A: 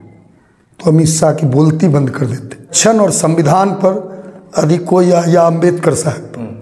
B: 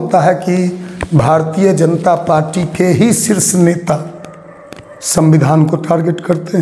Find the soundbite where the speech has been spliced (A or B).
A